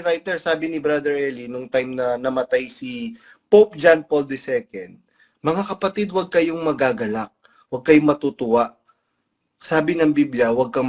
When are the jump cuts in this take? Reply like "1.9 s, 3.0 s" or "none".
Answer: none